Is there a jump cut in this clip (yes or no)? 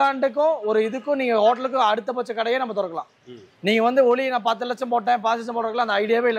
no